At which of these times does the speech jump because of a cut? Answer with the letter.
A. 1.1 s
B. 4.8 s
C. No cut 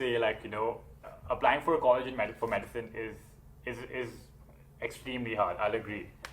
A